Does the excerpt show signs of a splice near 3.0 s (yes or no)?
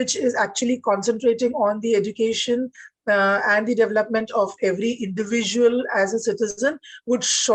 no